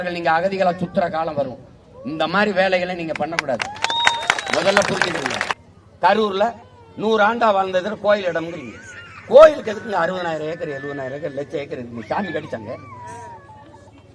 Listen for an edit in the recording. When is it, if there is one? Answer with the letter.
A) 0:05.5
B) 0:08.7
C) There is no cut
A